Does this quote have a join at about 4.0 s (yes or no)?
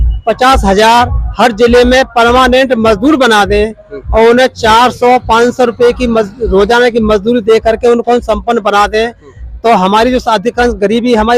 no